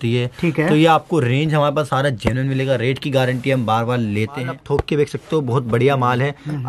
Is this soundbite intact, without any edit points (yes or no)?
yes